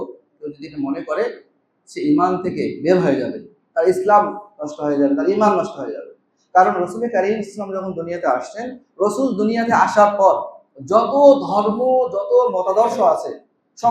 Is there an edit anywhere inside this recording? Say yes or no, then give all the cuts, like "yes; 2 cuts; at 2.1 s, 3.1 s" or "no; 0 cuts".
no; 0 cuts